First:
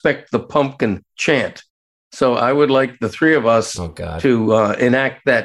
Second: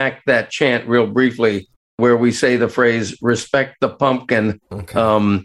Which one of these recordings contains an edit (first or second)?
second